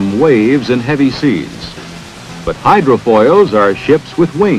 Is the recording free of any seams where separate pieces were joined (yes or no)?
yes